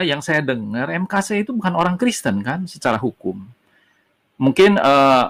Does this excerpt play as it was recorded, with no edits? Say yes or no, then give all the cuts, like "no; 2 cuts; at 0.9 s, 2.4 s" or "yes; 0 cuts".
yes; 0 cuts